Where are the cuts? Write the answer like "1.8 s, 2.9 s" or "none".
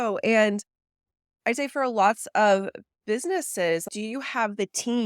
3.8 s